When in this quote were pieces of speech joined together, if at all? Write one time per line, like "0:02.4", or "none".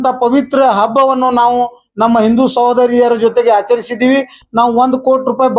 0:04.4